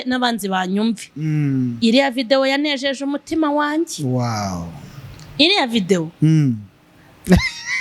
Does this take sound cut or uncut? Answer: uncut